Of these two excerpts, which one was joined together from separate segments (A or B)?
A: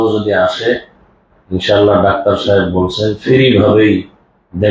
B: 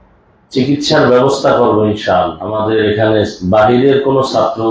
B